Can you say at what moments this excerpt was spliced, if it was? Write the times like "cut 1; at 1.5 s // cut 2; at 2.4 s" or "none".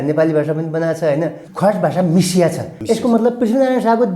cut 1; at 1.4 s // cut 2; at 2.7 s